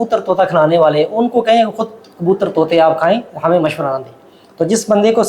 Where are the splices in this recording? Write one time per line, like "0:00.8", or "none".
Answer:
none